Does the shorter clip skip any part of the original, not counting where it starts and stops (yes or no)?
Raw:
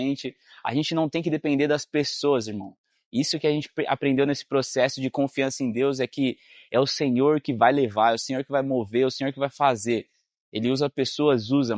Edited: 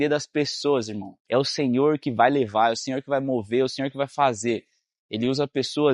yes